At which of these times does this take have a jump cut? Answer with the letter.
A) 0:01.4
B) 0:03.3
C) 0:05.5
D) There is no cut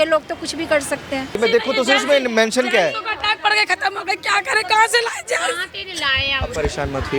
A